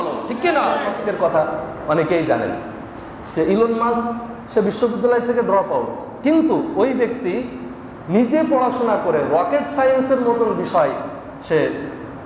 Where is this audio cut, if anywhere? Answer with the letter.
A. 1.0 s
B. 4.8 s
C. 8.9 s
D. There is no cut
A